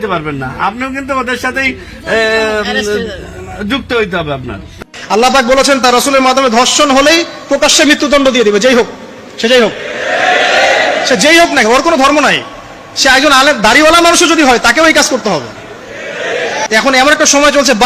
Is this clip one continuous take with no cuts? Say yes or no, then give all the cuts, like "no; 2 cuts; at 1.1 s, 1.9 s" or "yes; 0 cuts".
no; 2 cuts; at 4.6 s, 16.7 s